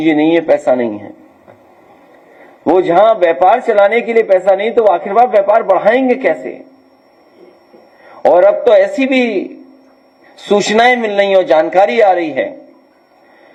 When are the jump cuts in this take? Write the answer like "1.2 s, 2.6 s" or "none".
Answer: none